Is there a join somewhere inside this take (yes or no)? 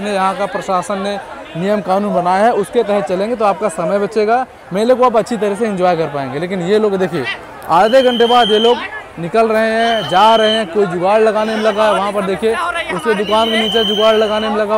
no